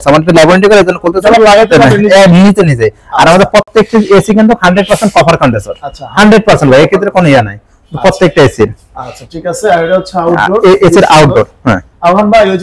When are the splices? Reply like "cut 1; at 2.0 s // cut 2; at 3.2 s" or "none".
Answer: none